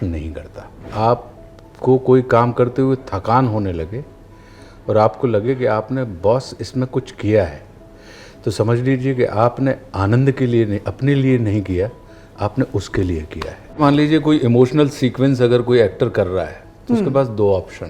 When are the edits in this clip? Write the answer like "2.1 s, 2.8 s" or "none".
0.9 s, 13.8 s